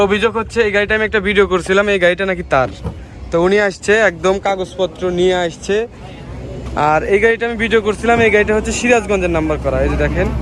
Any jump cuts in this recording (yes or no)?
no